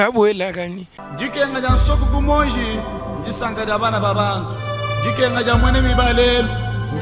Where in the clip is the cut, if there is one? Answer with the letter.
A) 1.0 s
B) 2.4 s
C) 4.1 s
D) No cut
A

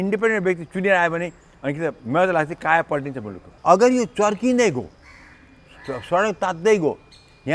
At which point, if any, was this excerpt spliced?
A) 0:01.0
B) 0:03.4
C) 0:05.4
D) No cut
B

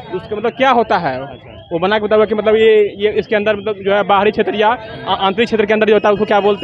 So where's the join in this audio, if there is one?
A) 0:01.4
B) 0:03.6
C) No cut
C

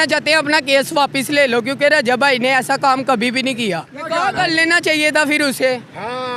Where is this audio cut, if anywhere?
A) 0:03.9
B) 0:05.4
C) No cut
A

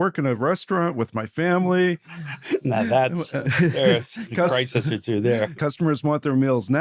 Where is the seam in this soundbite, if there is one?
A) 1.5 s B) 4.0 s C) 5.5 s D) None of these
C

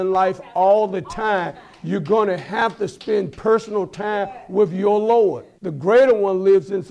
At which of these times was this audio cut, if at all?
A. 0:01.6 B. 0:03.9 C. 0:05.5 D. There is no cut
C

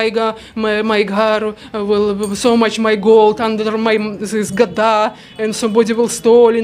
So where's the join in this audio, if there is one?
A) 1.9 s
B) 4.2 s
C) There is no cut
C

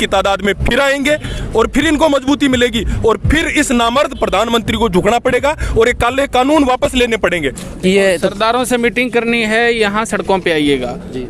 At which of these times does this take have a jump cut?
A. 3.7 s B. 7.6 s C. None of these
B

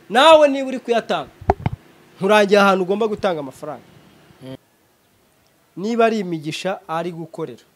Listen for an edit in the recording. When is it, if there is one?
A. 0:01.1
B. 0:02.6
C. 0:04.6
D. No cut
C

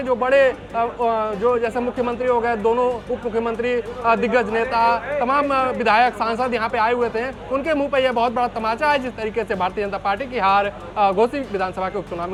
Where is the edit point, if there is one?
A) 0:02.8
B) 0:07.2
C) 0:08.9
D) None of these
D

